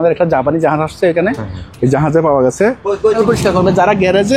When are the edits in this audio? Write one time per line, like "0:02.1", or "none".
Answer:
0:03.2